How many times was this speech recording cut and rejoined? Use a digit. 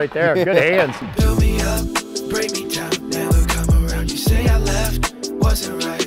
1